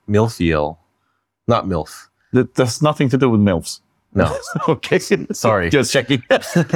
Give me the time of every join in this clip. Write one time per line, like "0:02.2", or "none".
none